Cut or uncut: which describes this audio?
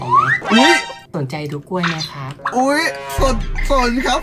uncut